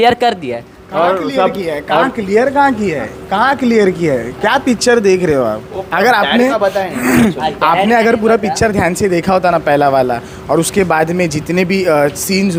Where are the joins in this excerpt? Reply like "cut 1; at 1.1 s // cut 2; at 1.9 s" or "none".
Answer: none